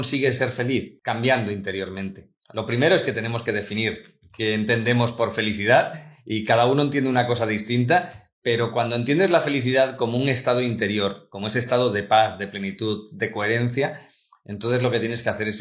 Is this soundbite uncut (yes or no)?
no